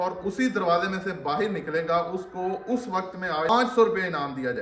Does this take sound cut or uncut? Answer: cut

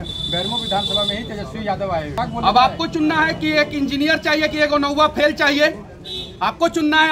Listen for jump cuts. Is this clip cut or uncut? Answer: cut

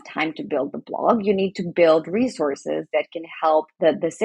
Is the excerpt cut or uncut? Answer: uncut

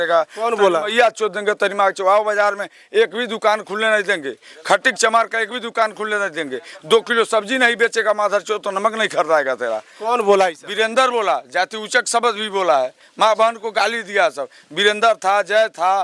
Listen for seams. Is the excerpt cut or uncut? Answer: uncut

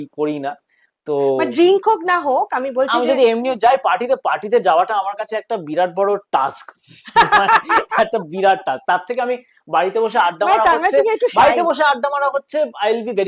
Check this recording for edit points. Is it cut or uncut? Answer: uncut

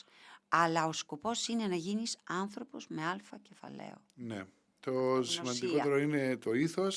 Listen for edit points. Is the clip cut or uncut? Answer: uncut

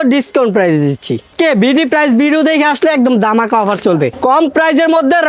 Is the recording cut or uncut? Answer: cut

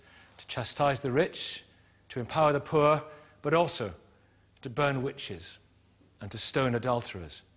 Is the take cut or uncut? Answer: uncut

